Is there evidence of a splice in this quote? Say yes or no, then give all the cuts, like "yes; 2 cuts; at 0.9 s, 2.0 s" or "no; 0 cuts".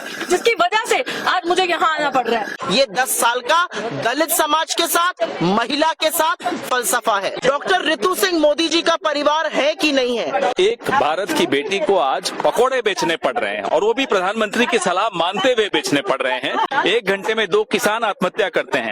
yes; 4 cuts; at 2.5 s, 7.4 s, 10.5 s, 16.7 s